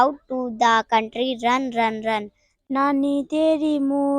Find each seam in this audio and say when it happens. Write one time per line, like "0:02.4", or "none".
0:02.4